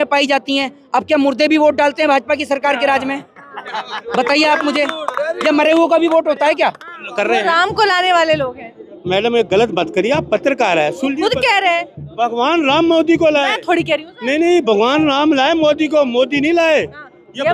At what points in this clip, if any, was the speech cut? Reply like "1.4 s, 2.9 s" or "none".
7.0 s